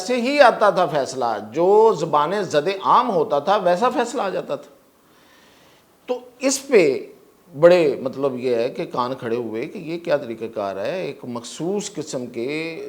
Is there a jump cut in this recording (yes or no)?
no